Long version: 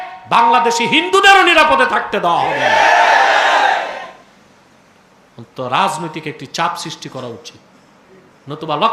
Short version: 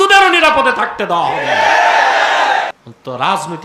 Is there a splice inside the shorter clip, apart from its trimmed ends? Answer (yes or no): yes